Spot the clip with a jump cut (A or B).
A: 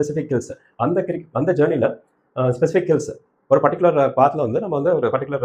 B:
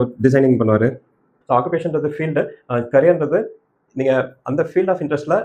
B